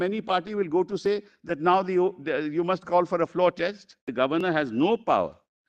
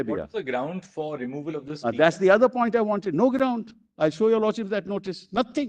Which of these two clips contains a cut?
first; 1 cut; at 4.1 s

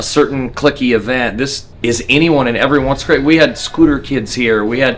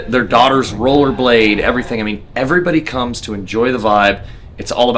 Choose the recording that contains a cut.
first; 1 cut; at 1.6 s

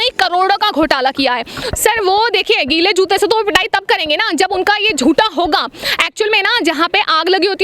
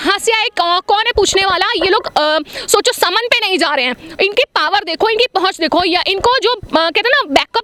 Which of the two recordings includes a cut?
first; 1 cut; at 1.6 s

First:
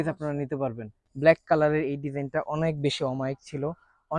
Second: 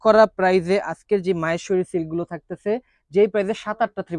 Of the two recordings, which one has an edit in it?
first; 1 cut; at 1.0 s

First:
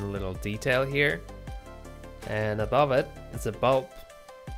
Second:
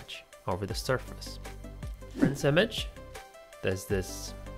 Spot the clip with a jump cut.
second; 1 cut; at 2.3 s

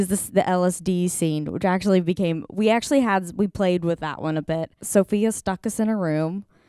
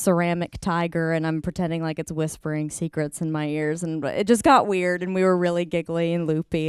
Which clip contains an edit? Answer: first; 1 cut; at 4.7 s

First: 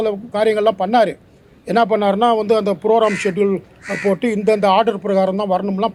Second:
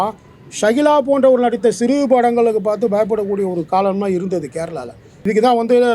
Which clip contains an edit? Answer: second; 1 cut; at 5.1 s

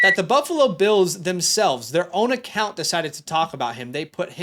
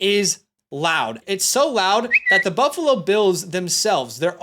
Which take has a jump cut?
second; 1 cut; at 1.2 s

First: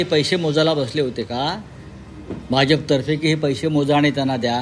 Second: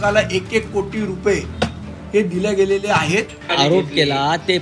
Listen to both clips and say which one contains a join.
second; 1 cut; at 3.4 s

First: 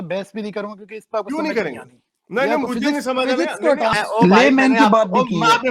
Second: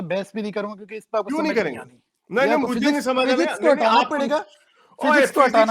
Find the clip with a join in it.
first; 1 cut; at 3.9 s

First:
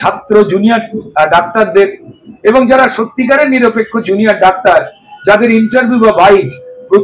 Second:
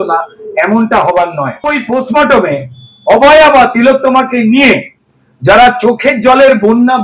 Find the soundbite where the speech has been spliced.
second; 1 cut; at 1.7 s

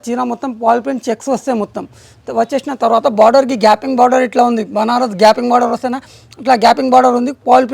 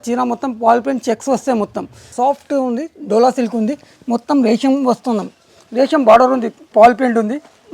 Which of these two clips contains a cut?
second; 2 cuts; at 2.1 s, 6.7 s

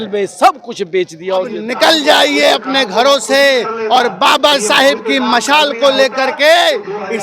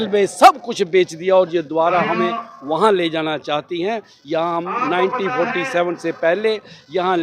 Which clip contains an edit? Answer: first; 1 cut; at 1.6 s

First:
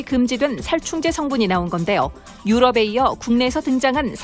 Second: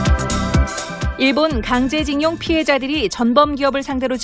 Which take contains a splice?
first; 1 cut; at 3.2 s

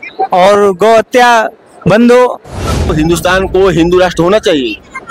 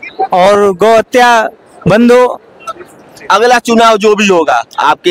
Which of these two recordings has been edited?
first; 1 cut; at 2.9 s

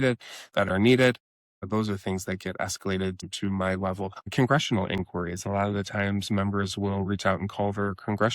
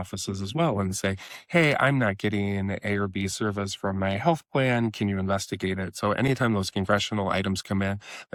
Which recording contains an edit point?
first; 2 cuts; at 3.3 s, 4.2 s

